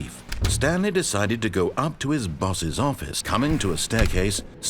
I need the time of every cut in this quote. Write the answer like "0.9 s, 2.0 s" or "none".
3.1 s

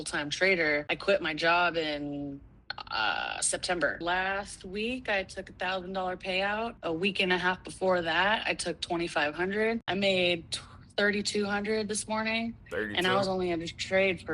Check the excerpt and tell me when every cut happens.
0.9 s, 4.0 s, 6.8 s, 9.8 s

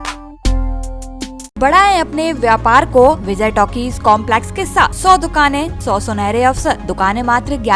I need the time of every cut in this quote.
1.6 s, 3.3 s, 5.0 s, 5.8 s, 6.9 s

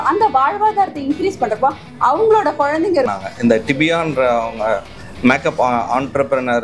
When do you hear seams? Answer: 3.1 s

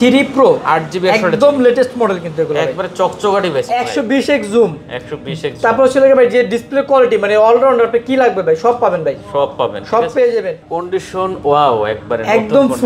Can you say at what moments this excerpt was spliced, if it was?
3.7 s, 10.7 s

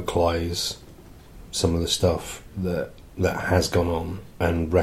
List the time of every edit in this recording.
none

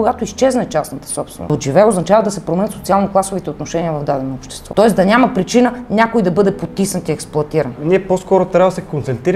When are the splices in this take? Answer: 1.5 s, 4.5 s, 7.8 s

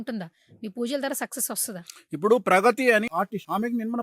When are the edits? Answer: 3.1 s

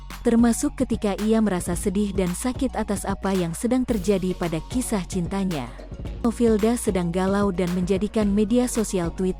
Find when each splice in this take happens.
6.2 s

